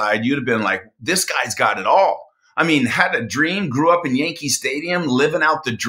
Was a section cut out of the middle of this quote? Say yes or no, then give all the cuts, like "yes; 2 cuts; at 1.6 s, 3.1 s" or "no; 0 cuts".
no; 0 cuts